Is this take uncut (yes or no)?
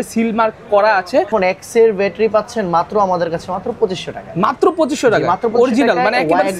no